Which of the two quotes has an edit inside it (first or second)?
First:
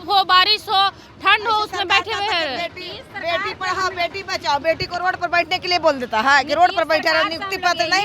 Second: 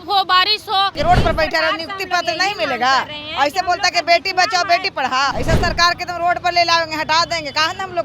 second